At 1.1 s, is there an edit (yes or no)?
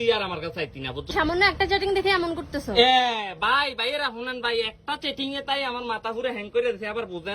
yes